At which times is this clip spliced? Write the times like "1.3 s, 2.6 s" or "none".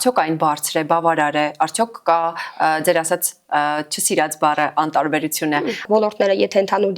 5.8 s